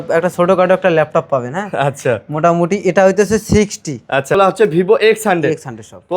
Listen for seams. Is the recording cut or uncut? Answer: cut